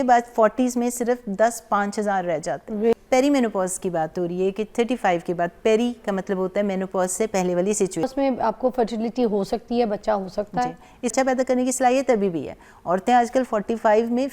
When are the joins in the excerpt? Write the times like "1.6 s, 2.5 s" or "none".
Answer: 2.9 s, 8.0 s, 11.1 s

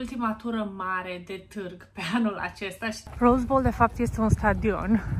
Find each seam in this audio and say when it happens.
3.1 s

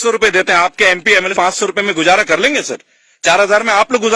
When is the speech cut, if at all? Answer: 1.3 s

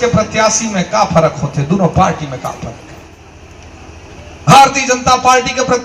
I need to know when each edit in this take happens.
none

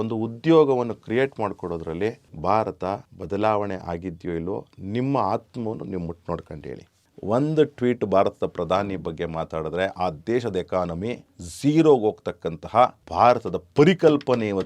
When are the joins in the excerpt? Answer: 6.9 s

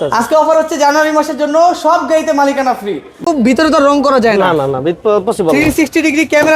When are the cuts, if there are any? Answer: 3.2 s

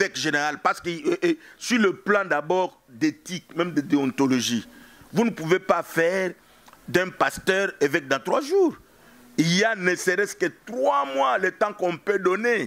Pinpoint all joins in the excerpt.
none

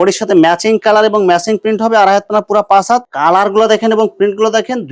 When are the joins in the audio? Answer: 3.1 s

